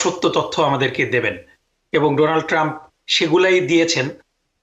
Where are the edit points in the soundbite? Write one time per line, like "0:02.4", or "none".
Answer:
none